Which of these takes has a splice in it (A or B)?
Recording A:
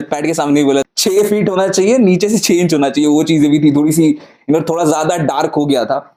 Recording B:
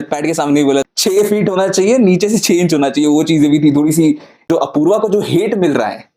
B